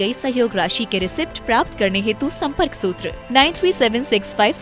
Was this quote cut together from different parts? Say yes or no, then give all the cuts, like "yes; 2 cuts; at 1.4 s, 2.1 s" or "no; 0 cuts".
no; 0 cuts